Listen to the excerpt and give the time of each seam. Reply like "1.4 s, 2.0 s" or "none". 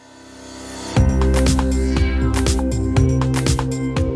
none